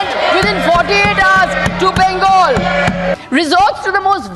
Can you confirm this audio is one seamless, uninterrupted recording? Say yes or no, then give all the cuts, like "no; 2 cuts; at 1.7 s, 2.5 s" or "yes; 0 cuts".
no; 1 cut; at 3.2 s